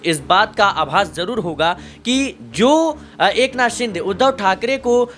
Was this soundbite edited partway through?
no; 0 cuts

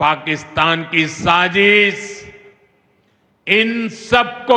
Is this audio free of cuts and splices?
yes; 0 cuts

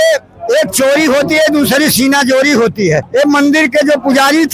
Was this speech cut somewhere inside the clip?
yes; 1 cut; at 3.1 s

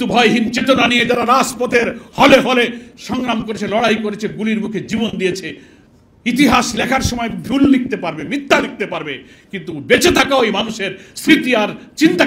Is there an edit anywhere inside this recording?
no; 0 cuts

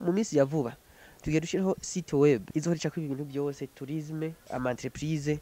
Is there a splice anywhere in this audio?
yes; 2 cuts; at 2.5 s, 4.4 s

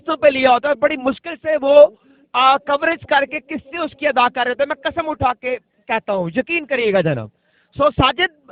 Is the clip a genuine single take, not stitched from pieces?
yes; 0 cuts

